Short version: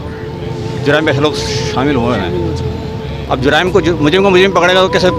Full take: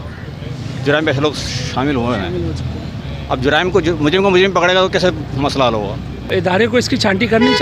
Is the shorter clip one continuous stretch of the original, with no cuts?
yes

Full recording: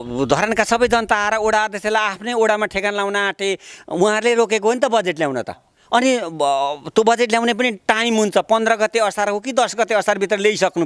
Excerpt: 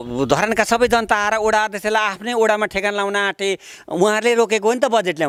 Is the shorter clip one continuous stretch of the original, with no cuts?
yes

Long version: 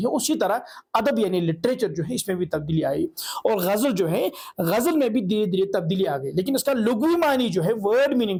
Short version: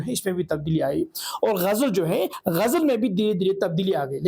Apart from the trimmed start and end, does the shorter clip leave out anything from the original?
yes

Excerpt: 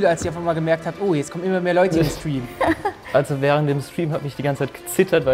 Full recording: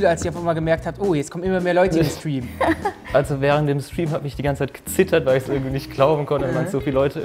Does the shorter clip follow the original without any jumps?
yes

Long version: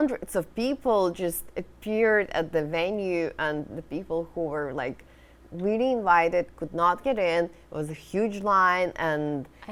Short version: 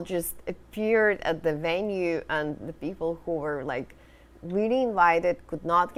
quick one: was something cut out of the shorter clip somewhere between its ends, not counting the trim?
no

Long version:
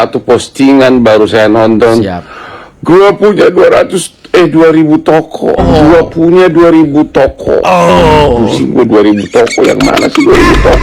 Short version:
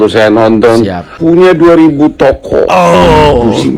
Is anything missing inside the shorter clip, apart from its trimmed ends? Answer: yes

